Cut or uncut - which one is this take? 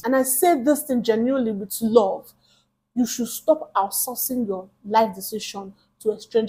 uncut